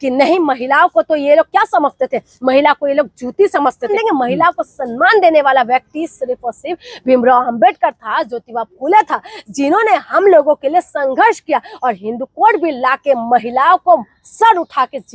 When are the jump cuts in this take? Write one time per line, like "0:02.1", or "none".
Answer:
0:03.9